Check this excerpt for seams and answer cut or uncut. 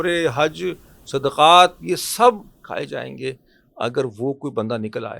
uncut